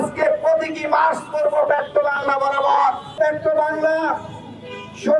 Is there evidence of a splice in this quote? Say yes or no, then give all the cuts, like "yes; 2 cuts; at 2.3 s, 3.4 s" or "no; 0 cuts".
yes; 1 cut; at 3.2 s